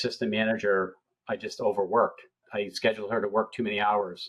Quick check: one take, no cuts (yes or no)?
no